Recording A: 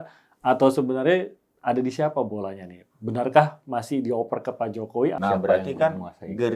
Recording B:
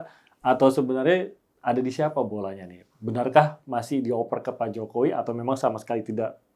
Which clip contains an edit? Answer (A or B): A